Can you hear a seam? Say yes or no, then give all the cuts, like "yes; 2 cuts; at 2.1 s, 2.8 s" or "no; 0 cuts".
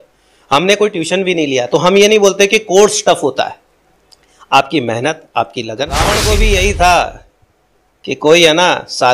yes; 1 cut; at 6.1 s